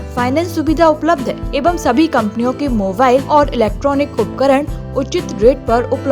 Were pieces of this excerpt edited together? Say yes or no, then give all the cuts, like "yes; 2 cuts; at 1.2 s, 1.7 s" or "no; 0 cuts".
yes; 2 cuts; at 1.5 s, 3.2 s